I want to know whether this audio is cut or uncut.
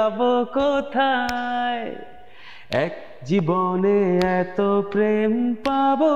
uncut